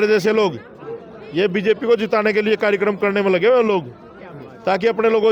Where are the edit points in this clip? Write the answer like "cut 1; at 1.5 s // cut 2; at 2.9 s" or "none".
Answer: none